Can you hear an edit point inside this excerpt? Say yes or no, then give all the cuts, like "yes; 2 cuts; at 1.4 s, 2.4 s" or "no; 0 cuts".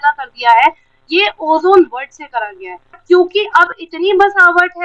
yes; 1 cut; at 3.0 s